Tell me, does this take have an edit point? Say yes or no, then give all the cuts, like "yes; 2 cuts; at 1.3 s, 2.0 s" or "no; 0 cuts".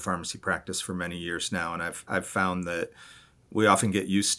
no; 0 cuts